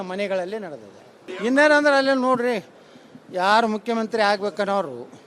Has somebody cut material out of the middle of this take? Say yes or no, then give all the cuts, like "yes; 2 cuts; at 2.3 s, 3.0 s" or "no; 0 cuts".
yes; 1 cut; at 1.2 s